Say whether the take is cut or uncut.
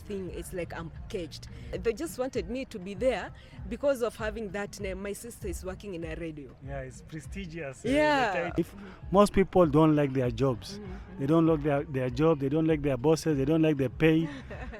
cut